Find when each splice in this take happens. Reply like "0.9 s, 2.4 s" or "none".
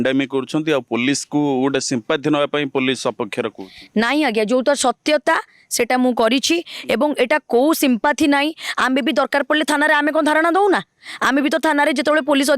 none

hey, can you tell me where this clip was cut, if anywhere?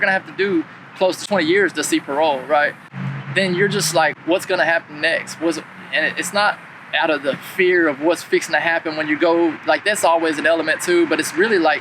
1.2 s, 2.9 s, 4.2 s

